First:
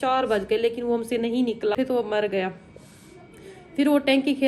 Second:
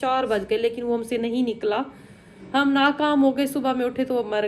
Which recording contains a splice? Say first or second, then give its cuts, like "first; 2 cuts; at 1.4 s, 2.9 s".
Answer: first; 1 cut; at 1.7 s